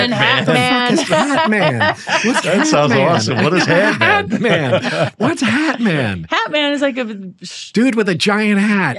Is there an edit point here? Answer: no; 0 cuts

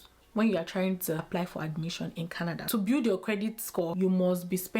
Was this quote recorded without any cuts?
no; 3 cuts; at 1.2 s, 2.6 s, 3.9 s

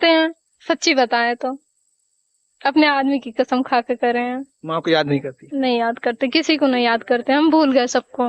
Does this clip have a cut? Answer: no; 0 cuts

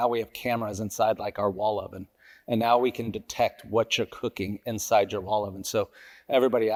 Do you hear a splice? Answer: no; 0 cuts

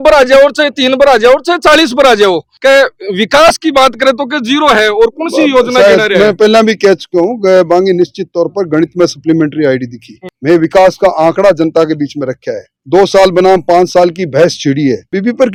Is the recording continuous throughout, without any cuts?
yes; 0 cuts

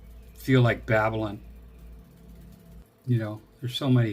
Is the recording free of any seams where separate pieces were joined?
no; 1 cut; at 2.8 s

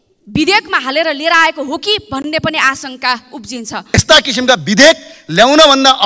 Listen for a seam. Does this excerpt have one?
yes; 1 cut; at 4.0 s

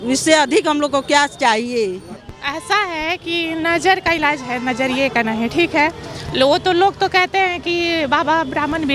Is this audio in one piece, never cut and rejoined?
no; 1 cut; at 2.2 s

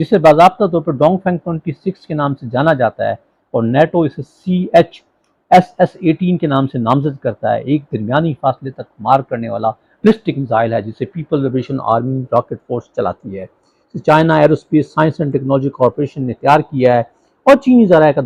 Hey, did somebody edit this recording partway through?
no; 0 cuts

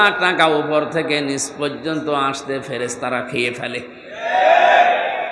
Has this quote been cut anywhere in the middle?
no; 0 cuts

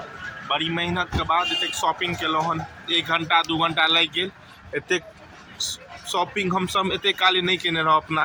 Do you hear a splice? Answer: no; 0 cuts

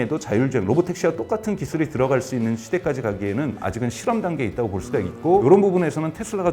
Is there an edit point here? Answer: yes; 2 cuts; at 3.6 s, 5.4 s

